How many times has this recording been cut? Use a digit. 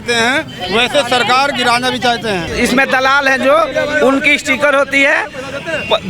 1